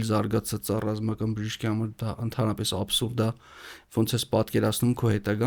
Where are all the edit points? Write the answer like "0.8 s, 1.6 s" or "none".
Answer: none